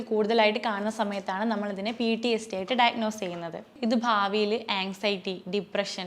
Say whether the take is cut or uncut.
cut